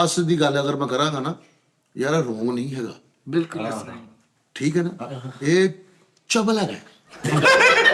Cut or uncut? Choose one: uncut